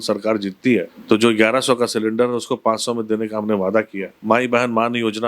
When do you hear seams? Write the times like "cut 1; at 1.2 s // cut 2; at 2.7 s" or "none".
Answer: cut 1; at 0.9 s // cut 2; at 4.1 s